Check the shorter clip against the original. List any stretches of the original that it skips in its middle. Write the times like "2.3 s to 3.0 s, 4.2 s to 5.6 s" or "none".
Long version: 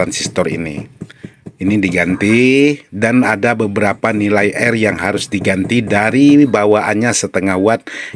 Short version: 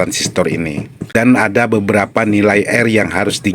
1.0 s to 2.9 s